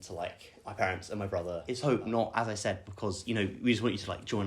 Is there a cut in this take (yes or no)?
yes